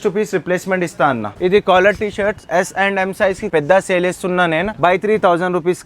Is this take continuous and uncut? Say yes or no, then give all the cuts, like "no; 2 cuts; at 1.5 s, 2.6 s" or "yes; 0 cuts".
no; 3 cuts; at 1.3 s, 3.5 s, 4.7 s